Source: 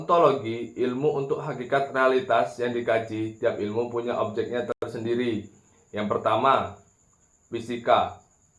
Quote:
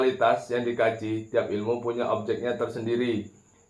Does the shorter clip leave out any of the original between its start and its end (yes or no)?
yes